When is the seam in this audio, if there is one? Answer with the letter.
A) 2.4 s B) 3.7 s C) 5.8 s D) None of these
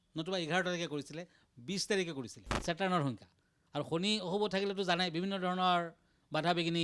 A